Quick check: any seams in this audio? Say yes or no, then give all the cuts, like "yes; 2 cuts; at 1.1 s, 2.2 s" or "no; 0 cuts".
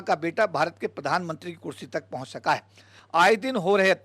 yes; 1 cut; at 2.9 s